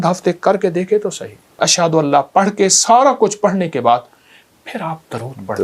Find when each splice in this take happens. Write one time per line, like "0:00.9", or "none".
0:01.6